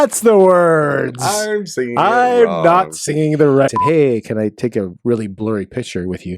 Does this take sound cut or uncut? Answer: cut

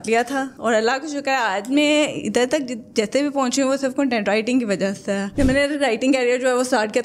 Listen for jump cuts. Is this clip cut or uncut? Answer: cut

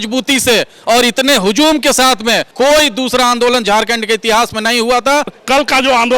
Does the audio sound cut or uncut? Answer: cut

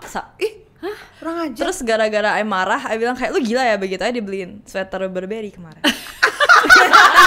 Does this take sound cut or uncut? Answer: uncut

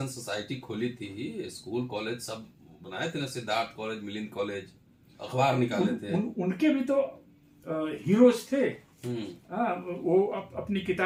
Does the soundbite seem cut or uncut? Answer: uncut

